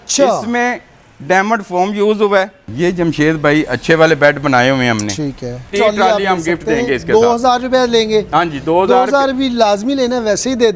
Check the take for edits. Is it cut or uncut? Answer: cut